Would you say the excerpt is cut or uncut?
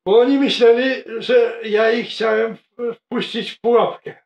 uncut